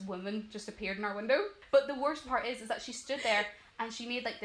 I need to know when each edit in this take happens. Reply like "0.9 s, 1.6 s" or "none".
1.6 s